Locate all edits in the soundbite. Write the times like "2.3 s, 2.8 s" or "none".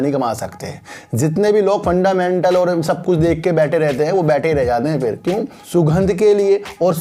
5.5 s